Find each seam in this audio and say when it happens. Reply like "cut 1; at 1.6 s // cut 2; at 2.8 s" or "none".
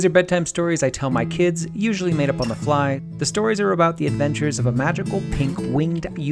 cut 1; at 3.1 s